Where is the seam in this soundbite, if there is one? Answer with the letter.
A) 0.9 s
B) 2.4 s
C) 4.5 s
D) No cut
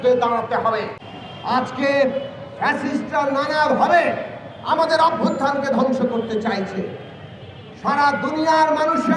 A